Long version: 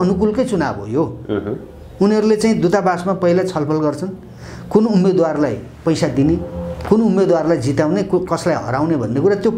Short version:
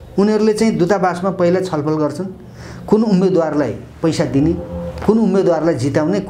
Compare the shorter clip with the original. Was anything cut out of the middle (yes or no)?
no